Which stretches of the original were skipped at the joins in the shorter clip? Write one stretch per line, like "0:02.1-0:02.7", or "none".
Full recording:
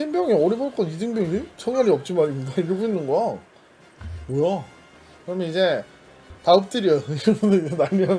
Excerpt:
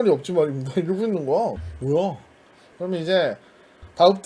0:03.5-0:04.2